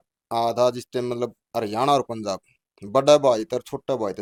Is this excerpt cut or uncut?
uncut